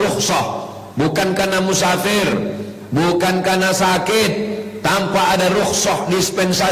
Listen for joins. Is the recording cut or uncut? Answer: uncut